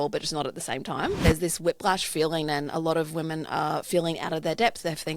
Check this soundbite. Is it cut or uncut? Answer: cut